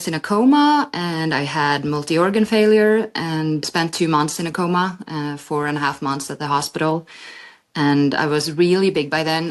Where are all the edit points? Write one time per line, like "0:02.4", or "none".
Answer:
none